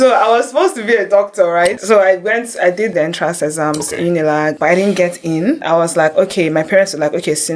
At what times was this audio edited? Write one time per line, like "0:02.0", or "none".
0:01.8
0:02.9
0:04.6
0:05.6